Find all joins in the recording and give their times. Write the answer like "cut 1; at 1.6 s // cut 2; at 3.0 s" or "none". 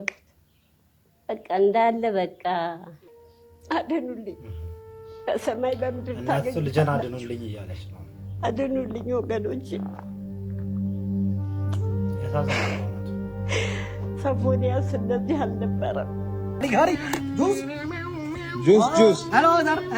cut 1; at 2.9 s // cut 2; at 16.6 s